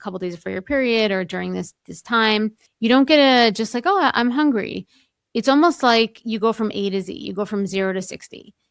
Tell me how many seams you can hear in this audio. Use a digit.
0